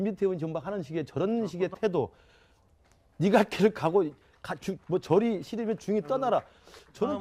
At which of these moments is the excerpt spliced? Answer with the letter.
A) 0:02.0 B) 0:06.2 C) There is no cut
C